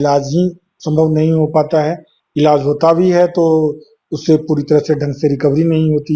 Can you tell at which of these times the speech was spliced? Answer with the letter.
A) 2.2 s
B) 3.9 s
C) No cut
C